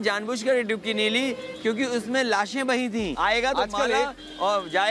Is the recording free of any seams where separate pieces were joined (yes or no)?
no